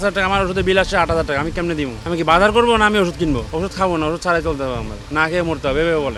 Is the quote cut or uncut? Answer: uncut